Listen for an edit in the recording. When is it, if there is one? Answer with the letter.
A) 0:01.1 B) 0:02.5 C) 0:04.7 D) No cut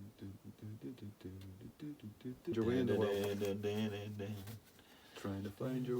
B